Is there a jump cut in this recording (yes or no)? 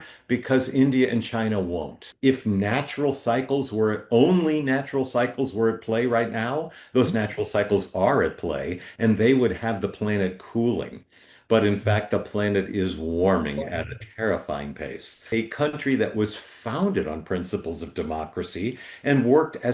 yes